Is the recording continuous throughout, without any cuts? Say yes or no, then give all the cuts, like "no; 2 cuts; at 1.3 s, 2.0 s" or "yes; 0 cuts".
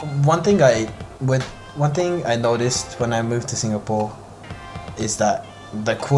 yes; 0 cuts